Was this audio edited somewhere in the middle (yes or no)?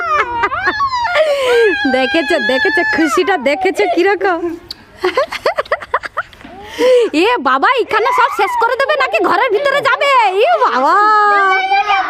no